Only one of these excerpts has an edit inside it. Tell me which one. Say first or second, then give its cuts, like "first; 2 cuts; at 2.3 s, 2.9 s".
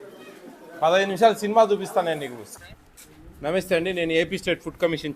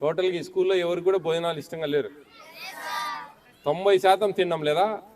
first; 1 cut; at 2.4 s